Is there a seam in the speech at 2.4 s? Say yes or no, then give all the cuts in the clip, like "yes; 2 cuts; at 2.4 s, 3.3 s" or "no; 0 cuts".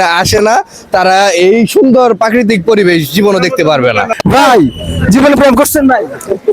no; 1 cut; at 4.1 s